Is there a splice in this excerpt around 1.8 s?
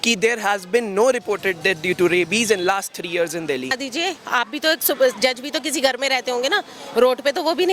no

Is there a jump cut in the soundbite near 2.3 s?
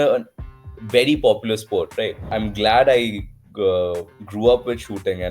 yes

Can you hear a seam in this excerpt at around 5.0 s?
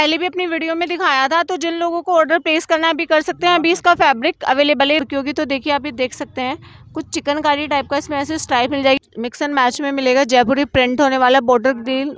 yes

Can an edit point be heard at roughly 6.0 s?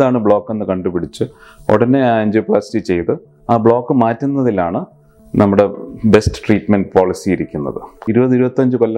no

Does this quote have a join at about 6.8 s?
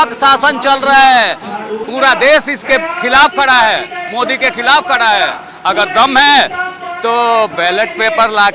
no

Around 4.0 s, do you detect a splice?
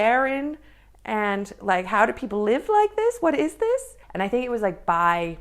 yes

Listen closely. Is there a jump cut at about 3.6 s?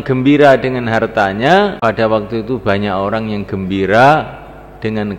no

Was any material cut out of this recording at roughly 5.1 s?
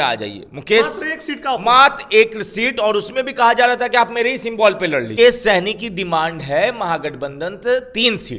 yes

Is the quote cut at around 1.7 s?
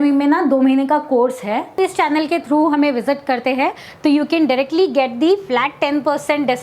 yes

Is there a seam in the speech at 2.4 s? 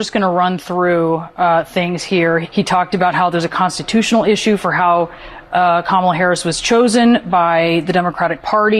yes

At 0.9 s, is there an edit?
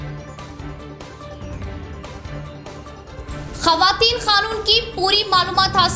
no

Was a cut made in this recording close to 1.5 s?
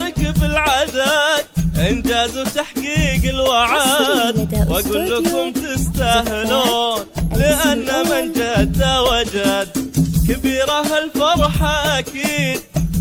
no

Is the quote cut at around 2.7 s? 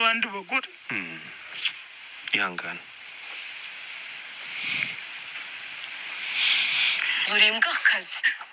no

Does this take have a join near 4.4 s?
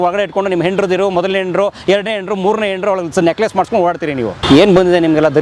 yes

